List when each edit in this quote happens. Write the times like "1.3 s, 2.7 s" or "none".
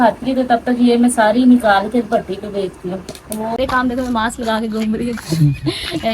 3.6 s